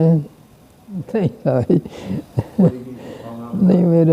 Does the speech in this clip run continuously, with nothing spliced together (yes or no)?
no